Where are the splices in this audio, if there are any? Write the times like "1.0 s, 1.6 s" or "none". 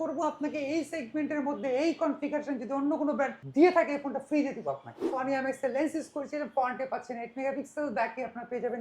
3.4 s, 5.1 s